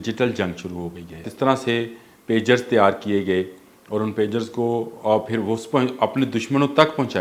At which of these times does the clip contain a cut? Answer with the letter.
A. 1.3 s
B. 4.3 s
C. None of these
A